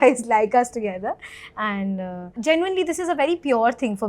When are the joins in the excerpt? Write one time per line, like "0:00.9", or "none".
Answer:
0:02.4

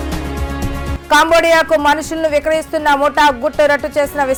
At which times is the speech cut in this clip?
none

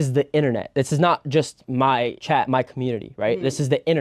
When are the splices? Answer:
0:02.2

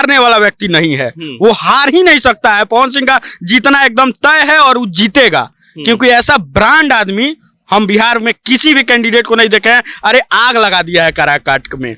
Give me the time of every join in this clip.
none

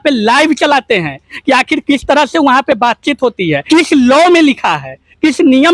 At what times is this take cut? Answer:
0:03.6

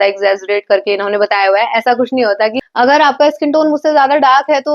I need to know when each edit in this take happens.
0:02.6

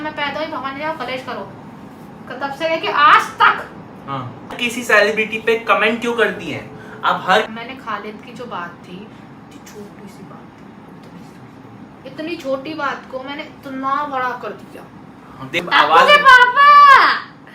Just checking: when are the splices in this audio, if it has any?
0:04.6
0:07.5
0:15.6

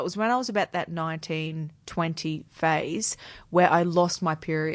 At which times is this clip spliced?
none

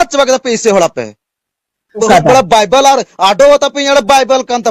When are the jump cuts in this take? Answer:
0:02.0

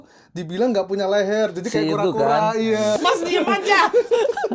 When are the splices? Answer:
0:03.0

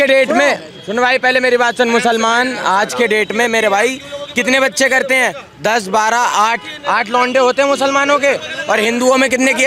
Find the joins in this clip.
none

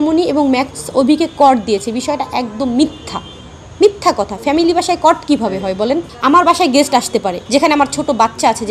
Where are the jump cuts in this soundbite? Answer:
0:06.1
0:07.4

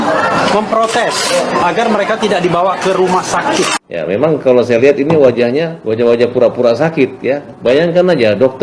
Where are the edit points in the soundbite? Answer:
0:03.7
0:05.8
0:07.5

